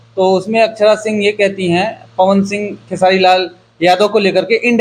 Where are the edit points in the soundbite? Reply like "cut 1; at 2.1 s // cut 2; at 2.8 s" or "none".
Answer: none